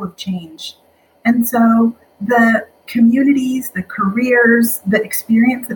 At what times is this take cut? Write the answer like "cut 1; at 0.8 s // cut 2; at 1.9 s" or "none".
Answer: cut 1; at 2.8 s